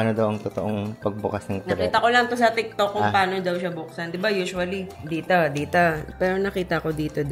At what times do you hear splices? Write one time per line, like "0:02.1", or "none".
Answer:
0:04.9
0:06.0